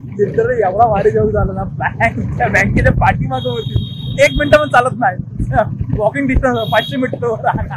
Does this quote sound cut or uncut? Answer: uncut